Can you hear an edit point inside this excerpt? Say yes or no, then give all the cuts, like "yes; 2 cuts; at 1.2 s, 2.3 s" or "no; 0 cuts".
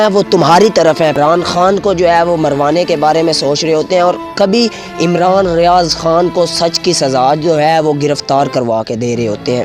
no; 0 cuts